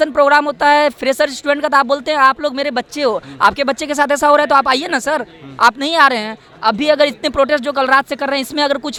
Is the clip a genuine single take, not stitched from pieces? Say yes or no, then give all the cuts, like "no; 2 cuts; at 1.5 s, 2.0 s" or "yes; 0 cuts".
yes; 0 cuts